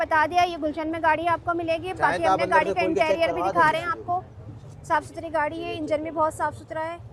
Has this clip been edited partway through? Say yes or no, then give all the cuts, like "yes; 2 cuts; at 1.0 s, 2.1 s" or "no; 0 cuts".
no; 0 cuts